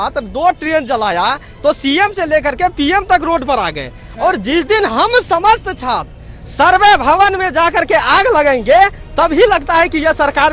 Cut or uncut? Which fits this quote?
uncut